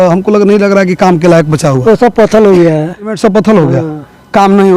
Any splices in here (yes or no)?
yes